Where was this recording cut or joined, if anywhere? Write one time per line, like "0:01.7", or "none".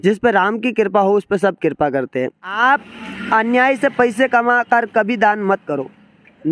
0:02.6